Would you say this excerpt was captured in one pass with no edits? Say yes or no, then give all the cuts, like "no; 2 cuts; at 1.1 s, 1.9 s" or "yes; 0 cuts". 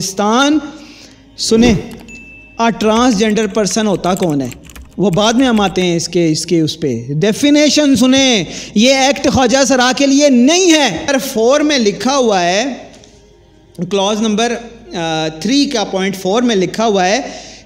no; 1 cut; at 11.1 s